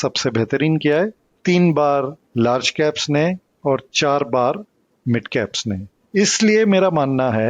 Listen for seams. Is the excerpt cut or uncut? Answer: cut